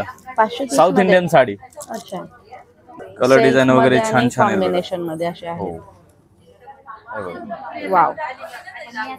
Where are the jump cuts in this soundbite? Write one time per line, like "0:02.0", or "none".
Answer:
0:03.0